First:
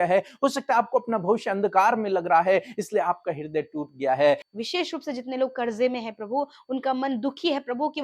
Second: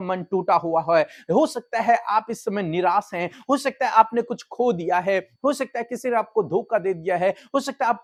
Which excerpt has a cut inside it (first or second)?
first